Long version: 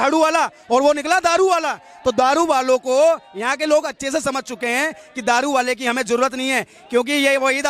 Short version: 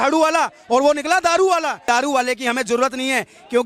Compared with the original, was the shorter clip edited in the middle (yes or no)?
yes